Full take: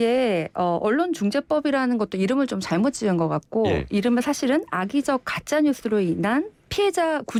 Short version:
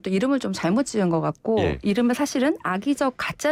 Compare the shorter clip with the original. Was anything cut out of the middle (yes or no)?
no